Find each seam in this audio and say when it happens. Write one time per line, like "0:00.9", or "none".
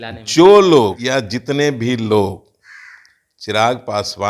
0:01.0